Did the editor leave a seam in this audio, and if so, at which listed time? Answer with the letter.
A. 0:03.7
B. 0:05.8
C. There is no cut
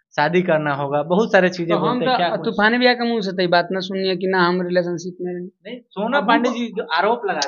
C